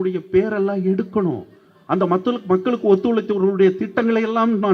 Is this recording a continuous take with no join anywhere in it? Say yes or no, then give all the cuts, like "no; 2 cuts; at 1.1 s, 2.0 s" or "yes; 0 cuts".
yes; 0 cuts